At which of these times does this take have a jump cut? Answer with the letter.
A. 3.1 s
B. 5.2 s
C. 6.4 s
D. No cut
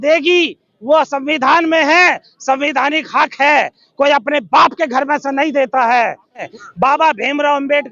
C